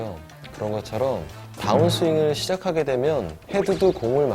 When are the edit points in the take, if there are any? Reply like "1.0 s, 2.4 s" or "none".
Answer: 3.4 s